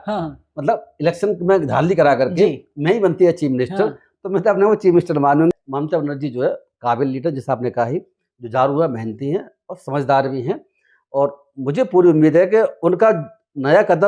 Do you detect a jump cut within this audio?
yes; 1 cut; at 5.5 s

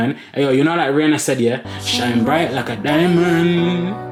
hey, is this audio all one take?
yes; 0 cuts

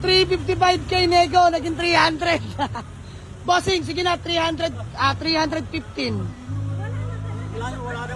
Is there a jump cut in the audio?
no; 0 cuts

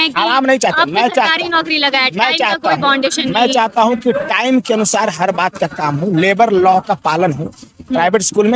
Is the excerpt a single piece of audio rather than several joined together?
yes; 0 cuts

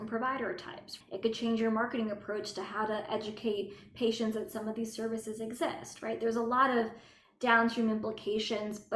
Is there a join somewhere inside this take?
yes; 1 cut; at 0.9 s

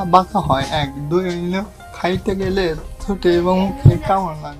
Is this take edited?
no; 0 cuts

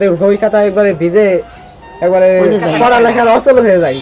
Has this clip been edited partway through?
no; 0 cuts

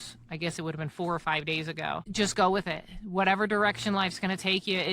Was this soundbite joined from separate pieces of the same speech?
yes; 1 cut; at 2.1 s

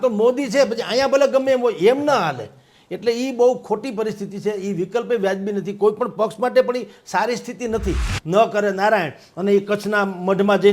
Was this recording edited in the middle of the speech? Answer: yes; 1 cut; at 8.1 s

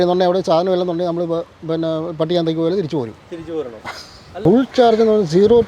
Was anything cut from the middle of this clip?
yes; 1 cut; at 4.4 s

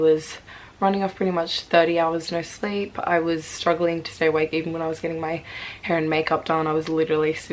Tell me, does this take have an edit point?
no; 0 cuts

